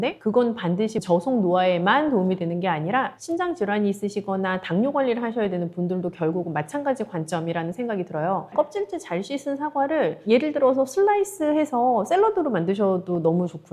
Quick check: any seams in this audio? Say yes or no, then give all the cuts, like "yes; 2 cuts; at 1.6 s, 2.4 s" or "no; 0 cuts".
yes; 1 cut; at 8.5 s